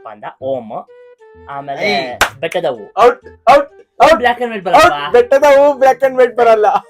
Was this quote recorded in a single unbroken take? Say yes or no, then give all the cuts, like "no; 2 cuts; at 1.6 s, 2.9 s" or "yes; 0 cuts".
no; 1 cut; at 5.2 s